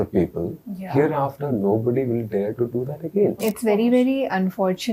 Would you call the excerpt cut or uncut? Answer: cut